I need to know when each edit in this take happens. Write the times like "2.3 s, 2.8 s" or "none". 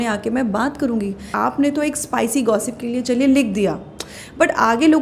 1.2 s